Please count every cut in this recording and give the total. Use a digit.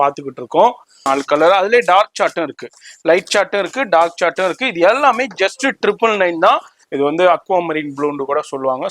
2